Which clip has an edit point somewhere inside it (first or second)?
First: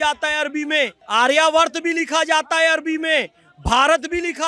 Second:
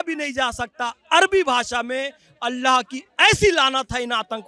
first